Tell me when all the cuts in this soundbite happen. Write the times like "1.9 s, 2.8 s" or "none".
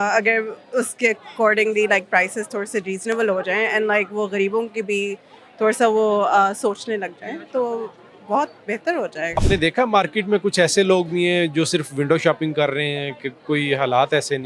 9.4 s